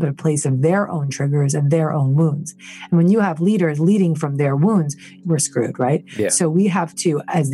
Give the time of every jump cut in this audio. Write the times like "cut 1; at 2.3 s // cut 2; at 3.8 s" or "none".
cut 1; at 5.2 s